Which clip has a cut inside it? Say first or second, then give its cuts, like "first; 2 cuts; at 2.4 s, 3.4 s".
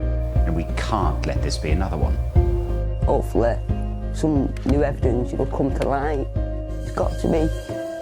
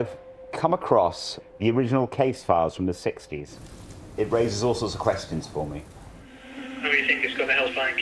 second; 1 cut; at 4.0 s